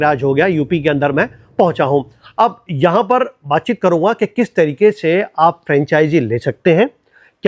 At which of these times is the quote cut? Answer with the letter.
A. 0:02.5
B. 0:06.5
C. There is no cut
C